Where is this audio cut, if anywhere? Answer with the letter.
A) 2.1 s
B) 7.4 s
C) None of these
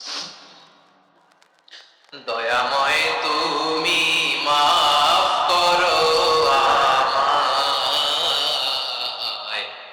C